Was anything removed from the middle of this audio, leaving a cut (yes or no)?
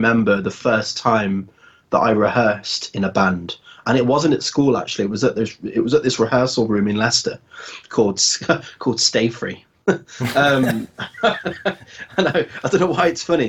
no